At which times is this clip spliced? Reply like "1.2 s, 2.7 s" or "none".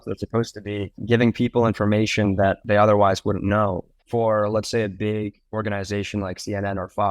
3.9 s